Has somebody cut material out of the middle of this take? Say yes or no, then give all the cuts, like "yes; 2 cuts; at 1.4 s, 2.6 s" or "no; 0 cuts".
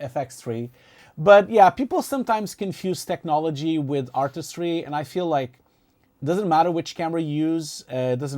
yes; 1 cut; at 1.0 s